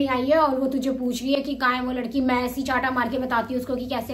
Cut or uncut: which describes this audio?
uncut